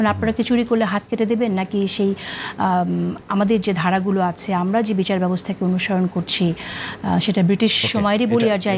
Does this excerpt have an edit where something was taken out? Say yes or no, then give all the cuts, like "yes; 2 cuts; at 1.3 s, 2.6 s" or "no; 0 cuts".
no; 0 cuts